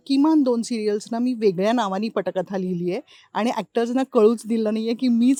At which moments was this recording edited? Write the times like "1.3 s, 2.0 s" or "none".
none